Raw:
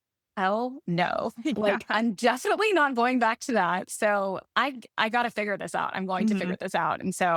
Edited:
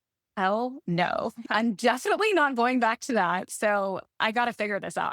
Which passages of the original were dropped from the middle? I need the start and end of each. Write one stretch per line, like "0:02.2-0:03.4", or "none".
0:01.4-0:01.8
0:04.5-0:04.8